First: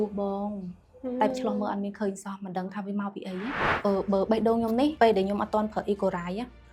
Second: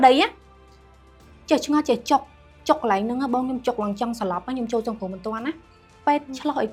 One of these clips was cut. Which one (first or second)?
first